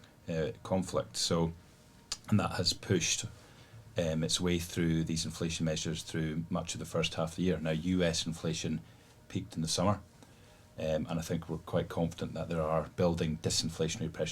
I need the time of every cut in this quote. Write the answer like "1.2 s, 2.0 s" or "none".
none